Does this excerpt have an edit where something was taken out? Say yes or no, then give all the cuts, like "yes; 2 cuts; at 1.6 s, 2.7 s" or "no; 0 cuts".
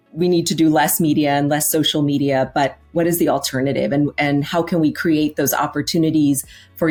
no; 0 cuts